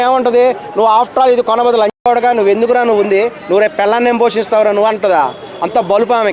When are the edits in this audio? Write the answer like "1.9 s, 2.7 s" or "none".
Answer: none